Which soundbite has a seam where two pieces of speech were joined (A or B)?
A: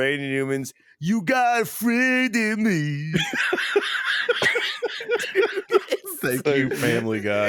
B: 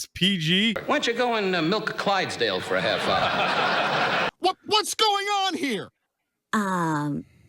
B